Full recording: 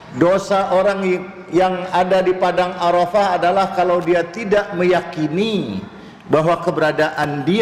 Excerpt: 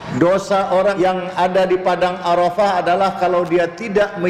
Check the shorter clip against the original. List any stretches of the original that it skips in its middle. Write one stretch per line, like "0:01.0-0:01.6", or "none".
0:00.9-0:01.5